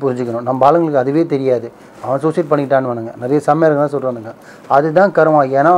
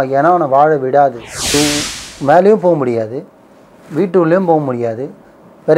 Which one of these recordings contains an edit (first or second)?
second